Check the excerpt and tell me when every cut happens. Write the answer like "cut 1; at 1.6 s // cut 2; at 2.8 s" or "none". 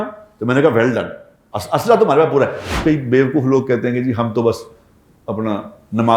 cut 1; at 2.8 s